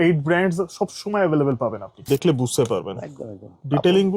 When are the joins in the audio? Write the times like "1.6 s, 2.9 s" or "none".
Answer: 2.0 s